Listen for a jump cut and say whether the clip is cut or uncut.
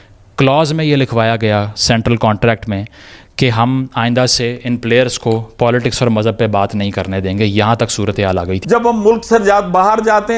cut